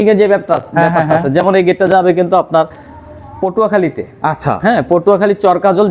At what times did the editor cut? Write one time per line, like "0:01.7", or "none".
none